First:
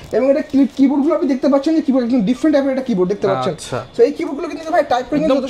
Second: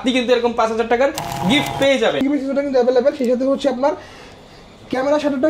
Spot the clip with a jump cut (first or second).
second